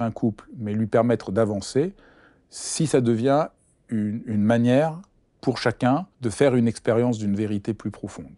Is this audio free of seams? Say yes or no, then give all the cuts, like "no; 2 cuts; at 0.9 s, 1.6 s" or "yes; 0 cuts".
no; 1 cut; at 6.2 s